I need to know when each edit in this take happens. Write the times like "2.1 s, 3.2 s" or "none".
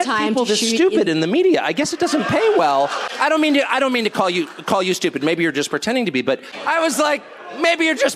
3.1 s, 6.5 s